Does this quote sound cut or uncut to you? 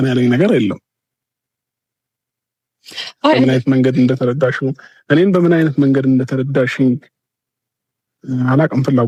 uncut